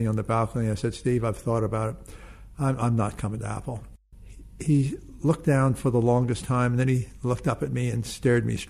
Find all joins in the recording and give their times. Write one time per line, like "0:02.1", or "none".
0:03.9